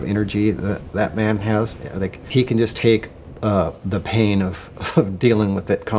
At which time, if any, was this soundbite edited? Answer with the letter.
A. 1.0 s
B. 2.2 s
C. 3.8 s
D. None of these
B